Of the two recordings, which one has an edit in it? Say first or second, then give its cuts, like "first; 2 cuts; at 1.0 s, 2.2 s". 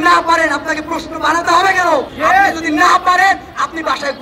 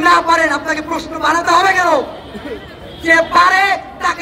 first; 1 cut; at 2.1 s